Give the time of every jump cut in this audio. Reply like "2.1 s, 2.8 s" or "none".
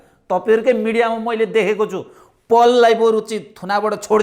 none